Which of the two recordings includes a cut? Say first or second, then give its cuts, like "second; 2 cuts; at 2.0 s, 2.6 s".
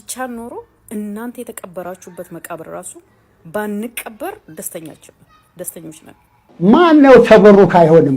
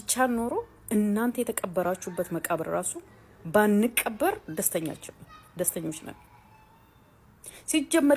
first; 1 cut; at 6.4 s